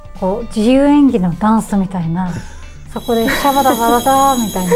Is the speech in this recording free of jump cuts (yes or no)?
yes